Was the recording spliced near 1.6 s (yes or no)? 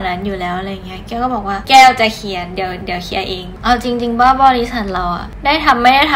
yes